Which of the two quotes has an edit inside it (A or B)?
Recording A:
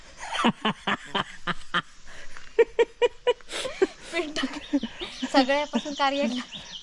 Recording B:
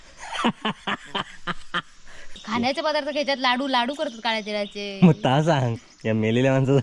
B